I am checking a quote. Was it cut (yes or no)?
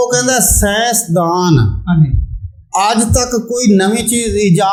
no